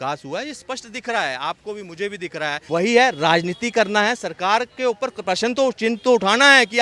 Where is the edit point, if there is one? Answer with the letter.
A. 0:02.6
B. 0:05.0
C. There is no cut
A